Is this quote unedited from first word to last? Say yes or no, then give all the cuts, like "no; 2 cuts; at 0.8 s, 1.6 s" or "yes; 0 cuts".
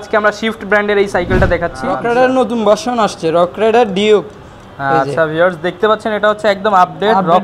no; 1 cut; at 1.9 s